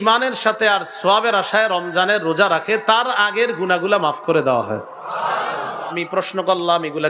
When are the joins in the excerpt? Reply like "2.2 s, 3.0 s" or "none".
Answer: 5.9 s